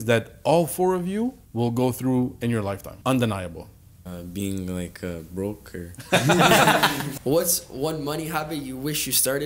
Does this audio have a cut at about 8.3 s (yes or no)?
no